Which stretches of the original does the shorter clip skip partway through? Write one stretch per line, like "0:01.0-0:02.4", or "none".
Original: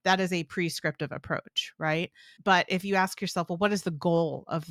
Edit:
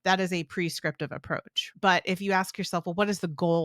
0:01.6-0:02.2